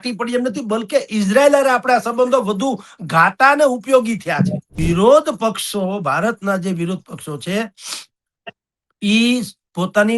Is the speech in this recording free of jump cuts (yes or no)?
no